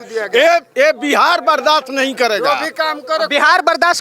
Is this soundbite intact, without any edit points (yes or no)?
yes